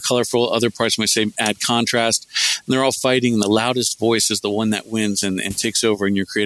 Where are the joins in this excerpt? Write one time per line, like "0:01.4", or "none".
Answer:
none

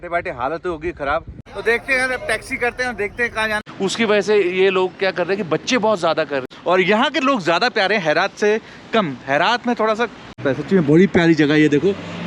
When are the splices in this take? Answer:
0:01.4
0:03.6
0:06.5
0:10.4

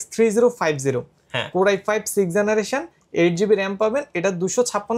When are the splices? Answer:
none

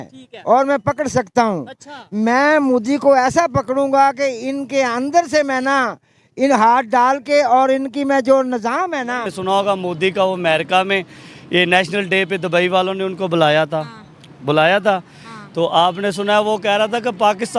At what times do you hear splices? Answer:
0:09.3

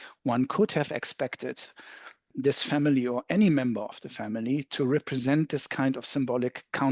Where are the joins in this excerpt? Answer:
0:02.3

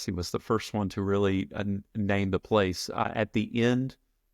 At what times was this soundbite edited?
0:03.0

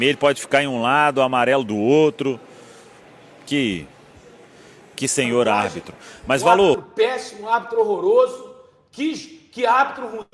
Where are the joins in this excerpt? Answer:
0:06.8

